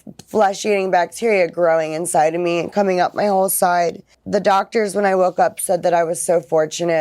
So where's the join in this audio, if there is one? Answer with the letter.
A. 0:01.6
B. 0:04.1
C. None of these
B